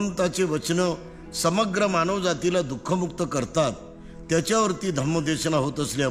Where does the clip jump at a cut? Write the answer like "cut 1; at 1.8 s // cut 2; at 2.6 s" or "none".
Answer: none